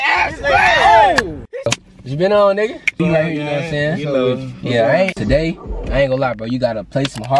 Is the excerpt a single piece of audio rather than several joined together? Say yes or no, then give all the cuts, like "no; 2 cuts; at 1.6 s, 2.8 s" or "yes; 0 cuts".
no; 3 cuts; at 1.8 s, 2.9 s, 5.2 s